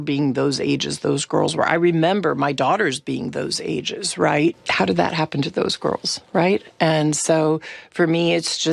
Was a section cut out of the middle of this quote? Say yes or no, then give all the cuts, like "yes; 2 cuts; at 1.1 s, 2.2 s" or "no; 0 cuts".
yes; 1 cut; at 4.6 s